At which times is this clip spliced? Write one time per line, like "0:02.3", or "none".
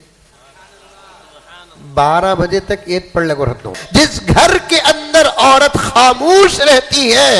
0:03.8